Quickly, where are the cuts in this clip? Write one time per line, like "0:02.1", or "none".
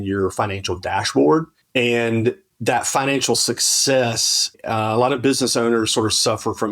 0:01.6
0:02.5